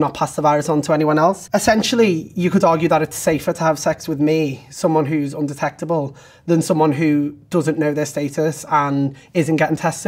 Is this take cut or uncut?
cut